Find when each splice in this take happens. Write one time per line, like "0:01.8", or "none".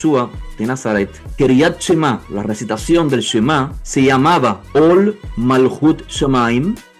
0:01.2
0:02.3
0:03.8
0:04.6